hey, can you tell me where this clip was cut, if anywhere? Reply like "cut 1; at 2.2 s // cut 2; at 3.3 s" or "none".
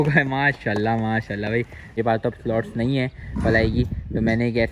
cut 1; at 1.9 s

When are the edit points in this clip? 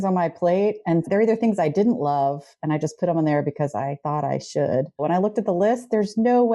cut 1; at 1.1 s // cut 2; at 4.0 s // cut 3; at 5.0 s

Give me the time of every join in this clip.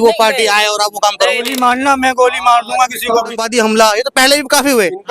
cut 1; at 1.5 s // cut 2; at 3.4 s

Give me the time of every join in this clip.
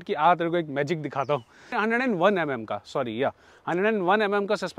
cut 1; at 1.7 s

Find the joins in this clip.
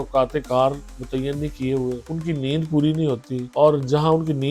cut 1; at 2.1 s // cut 2; at 3.4 s

